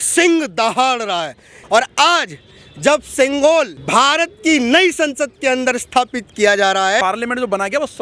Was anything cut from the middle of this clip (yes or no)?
yes